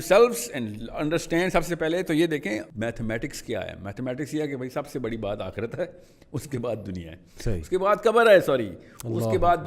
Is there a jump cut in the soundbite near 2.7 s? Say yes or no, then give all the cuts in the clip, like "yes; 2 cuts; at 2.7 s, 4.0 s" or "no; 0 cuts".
yes; 1 cut; at 2.7 s